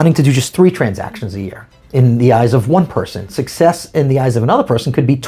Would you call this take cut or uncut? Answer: uncut